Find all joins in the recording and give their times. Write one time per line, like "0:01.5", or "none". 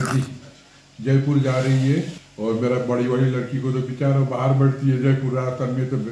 0:02.2